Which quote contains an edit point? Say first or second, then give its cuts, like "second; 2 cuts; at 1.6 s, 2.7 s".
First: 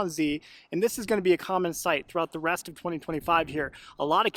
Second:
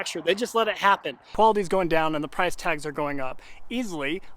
second; 1 cut; at 1.2 s